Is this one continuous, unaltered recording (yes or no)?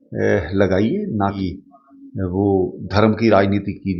no